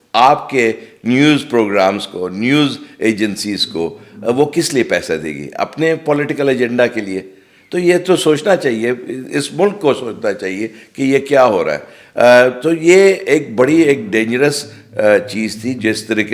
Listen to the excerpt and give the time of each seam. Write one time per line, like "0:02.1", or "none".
none